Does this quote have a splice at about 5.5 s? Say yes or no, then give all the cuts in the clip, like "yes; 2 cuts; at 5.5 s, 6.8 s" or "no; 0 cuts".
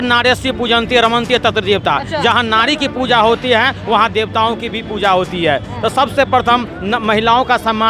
no; 0 cuts